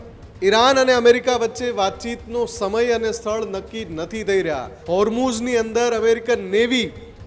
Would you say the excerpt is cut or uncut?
cut